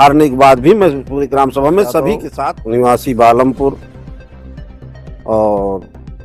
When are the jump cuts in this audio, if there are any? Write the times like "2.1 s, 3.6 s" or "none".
2.3 s, 3.9 s, 5.2 s